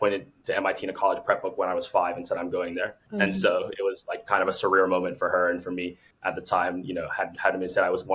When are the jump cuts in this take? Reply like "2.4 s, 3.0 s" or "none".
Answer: 3.0 s, 6.0 s